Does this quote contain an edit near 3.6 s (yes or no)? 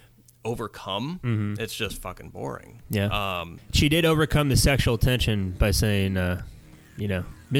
yes